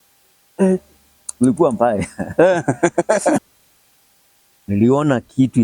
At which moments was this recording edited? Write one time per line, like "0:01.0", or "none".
0:03.4